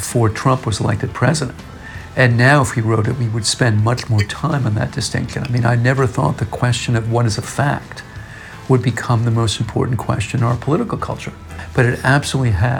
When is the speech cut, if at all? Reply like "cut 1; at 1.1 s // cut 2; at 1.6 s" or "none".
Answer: cut 1; at 11.6 s

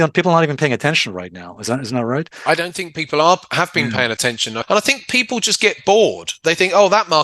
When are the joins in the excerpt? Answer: cut 1; at 4.5 s

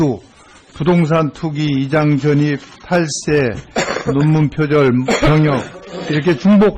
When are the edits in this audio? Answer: cut 1; at 2.5 s

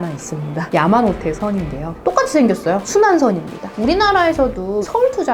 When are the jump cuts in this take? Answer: cut 1; at 3.8 s

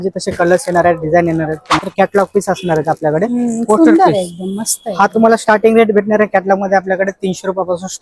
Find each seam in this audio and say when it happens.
cut 1; at 1.7 s

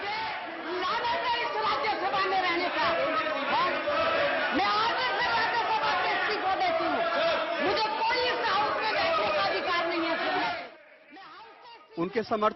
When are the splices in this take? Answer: cut 1; at 5.5 s

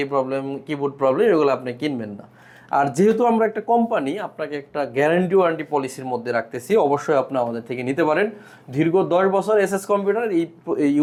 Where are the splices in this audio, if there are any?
none

